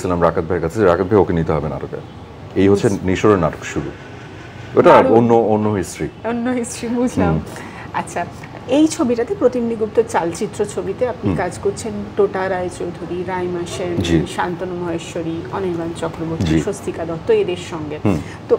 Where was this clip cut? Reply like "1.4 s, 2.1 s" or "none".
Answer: none

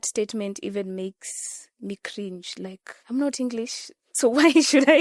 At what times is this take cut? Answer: 2.9 s

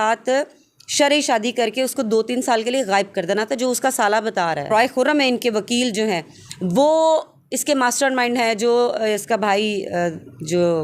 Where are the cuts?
4.7 s

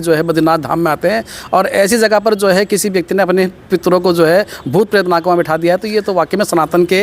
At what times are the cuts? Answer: none

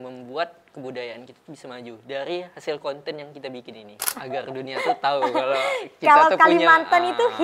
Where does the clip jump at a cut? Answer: 4.2 s

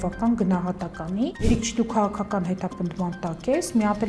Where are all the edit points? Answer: 1.5 s

